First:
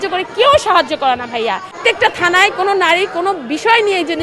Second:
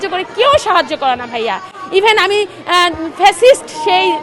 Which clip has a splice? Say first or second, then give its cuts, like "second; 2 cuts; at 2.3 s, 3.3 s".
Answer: first; 1 cut; at 1.8 s